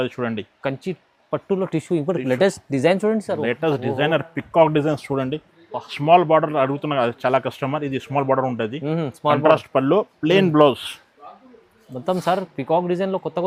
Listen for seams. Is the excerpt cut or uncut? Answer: uncut